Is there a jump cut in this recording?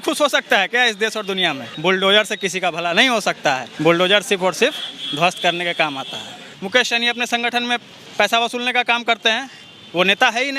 yes; 3 cuts; at 1.7 s, 3.7 s, 6.5 s

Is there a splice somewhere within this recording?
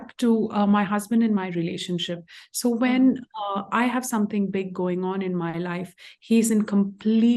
no; 0 cuts

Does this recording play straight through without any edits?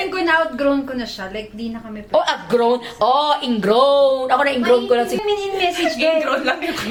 yes; 0 cuts

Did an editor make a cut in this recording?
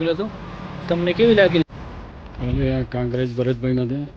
yes; 1 cut; at 1.6 s

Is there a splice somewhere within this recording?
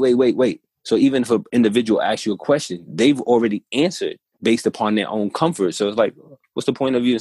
yes; 1 cut; at 4.3 s

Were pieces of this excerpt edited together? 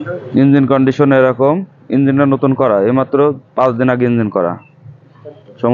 no; 0 cuts

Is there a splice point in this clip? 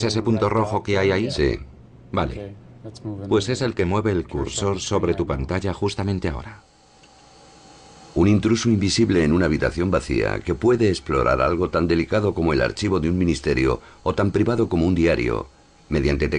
no; 0 cuts

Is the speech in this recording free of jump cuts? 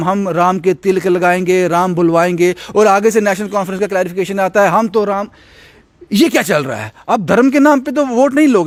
yes; 0 cuts

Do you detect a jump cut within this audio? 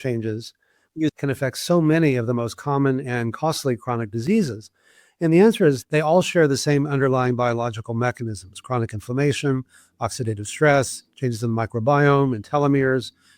yes; 2 cuts; at 1.1 s, 5.8 s

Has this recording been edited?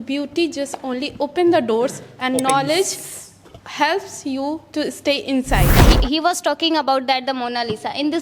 yes; 1 cut; at 5.8 s

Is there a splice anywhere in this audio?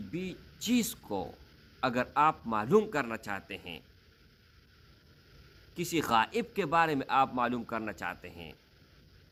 no; 0 cuts

